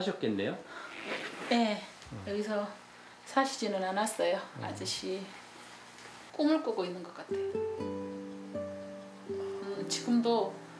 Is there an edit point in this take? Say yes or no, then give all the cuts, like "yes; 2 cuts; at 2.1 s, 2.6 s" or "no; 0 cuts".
no; 0 cuts